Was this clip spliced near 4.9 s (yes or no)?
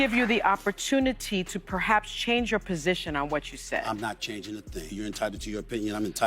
yes